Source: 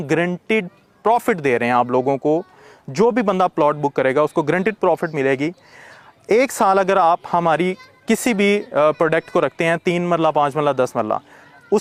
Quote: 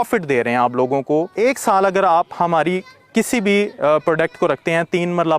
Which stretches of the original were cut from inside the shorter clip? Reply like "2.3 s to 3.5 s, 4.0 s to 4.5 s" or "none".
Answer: 2.5 s to 6.2 s